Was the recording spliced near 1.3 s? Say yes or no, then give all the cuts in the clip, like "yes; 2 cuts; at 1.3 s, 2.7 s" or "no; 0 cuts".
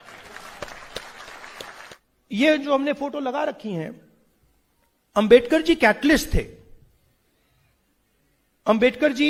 no; 0 cuts